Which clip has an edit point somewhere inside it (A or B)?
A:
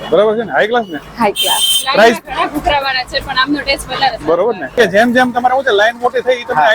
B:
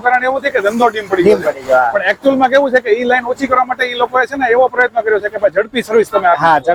A